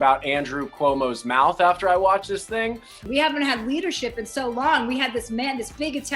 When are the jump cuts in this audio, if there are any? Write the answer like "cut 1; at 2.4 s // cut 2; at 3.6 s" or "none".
cut 1; at 2.9 s